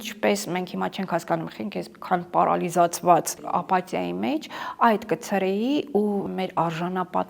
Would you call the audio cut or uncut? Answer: cut